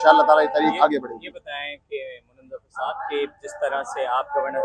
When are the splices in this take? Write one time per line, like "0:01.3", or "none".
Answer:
none